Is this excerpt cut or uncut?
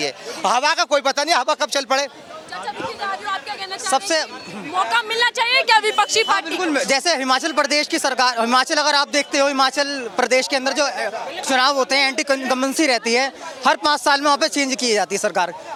uncut